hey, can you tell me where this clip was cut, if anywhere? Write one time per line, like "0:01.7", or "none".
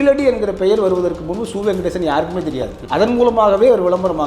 0:02.8